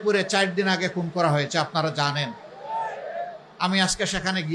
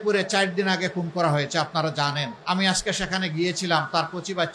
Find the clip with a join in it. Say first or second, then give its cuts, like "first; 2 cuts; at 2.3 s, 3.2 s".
second; 1 cut; at 2.3 s